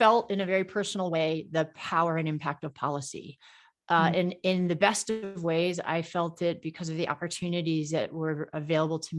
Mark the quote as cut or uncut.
uncut